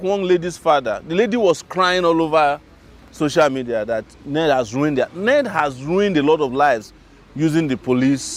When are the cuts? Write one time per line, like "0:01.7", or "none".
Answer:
none